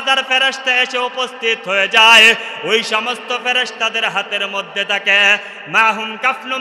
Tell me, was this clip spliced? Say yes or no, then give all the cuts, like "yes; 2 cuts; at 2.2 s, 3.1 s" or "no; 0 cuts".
no; 0 cuts